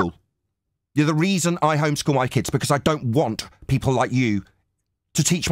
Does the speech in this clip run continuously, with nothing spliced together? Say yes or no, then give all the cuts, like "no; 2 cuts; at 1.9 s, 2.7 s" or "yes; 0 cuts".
yes; 0 cuts